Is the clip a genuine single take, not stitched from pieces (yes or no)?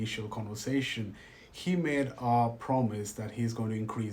yes